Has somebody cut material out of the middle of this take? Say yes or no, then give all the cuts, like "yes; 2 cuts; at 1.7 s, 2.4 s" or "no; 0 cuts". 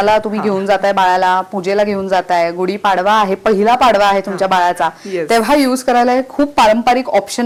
no; 0 cuts